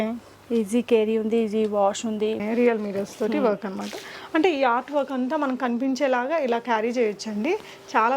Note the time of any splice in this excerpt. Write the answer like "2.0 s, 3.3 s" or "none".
2.4 s